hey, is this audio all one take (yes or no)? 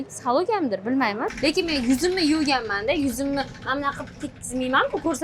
no